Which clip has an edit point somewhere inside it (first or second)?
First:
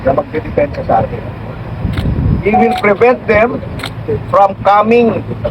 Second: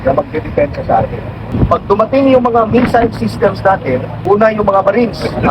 second